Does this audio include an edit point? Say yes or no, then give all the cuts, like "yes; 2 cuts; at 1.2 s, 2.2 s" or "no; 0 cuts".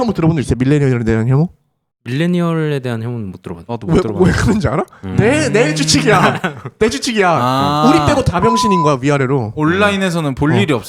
yes; 1 cut; at 5.0 s